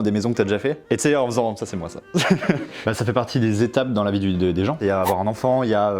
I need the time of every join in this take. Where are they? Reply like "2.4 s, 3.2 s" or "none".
2.8 s